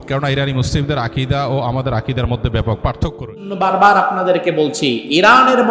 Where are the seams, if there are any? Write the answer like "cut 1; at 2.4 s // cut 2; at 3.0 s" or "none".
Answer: cut 1; at 3.5 s